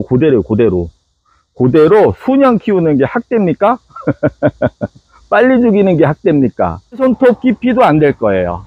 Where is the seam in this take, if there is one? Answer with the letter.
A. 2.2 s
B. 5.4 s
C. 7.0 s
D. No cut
C